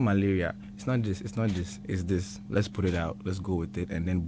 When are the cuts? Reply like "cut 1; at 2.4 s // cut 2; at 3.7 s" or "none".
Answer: none